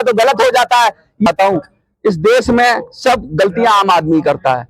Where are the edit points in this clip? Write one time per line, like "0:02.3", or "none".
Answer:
0:01.3